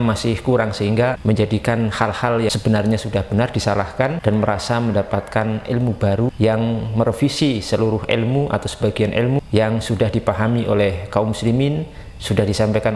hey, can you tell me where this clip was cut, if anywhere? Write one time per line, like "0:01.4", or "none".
0:01.2
0:02.5
0:04.2
0:06.3
0:09.4